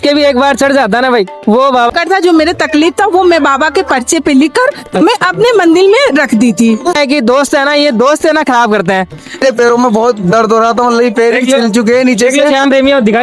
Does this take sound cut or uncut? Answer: cut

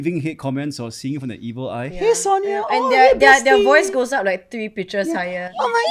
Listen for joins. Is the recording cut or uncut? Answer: uncut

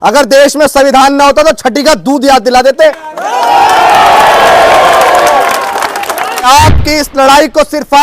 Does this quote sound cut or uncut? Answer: cut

